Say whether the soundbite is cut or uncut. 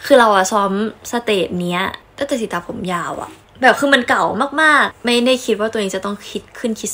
cut